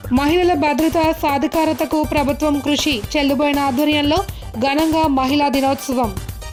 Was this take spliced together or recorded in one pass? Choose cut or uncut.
uncut